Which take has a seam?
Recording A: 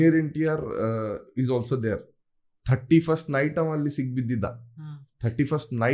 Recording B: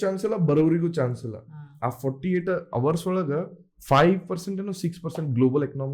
B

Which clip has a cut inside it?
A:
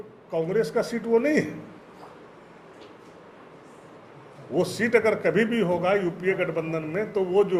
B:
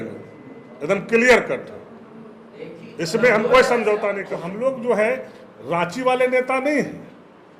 B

